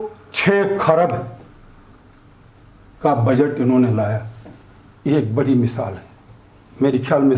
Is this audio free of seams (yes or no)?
yes